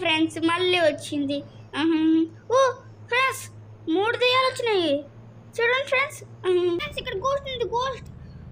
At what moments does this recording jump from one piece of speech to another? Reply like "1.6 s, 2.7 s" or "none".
7.0 s